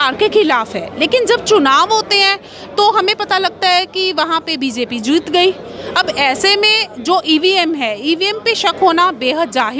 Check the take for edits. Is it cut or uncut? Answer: uncut